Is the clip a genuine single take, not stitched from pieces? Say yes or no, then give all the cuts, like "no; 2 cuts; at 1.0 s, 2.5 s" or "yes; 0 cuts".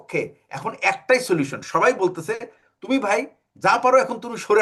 yes; 0 cuts